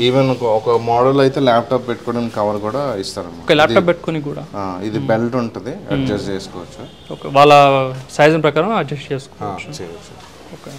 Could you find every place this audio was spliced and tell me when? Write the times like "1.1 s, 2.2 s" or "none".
none